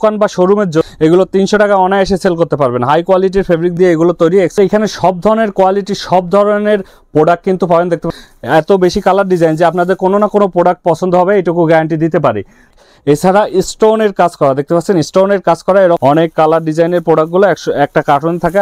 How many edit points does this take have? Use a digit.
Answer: 5